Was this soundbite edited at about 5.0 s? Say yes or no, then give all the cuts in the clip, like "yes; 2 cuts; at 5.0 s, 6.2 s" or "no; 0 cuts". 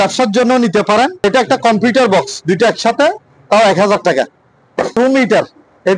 yes; 2 cuts; at 1.2 s, 5.0 s